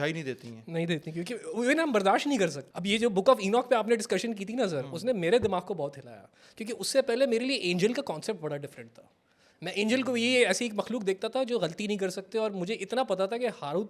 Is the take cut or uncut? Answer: cut